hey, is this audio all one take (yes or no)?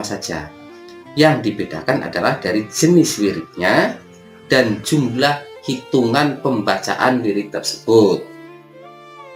yes